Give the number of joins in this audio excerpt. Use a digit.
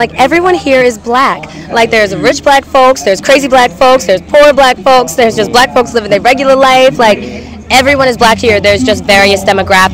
0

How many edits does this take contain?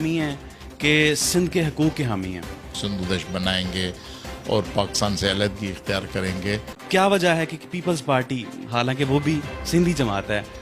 2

